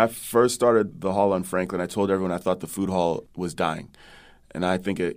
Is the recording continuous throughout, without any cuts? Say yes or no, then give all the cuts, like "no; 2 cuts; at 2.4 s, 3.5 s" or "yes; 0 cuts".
no; 1 cut; at 0.9 s